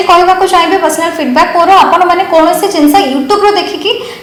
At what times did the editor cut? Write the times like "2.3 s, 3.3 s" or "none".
none